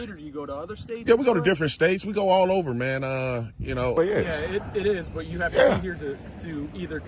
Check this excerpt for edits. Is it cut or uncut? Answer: cut